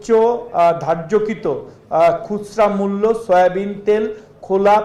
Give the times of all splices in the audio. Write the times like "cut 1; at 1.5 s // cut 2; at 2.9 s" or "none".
none